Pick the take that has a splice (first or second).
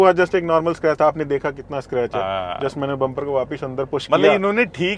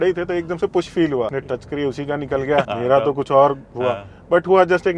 second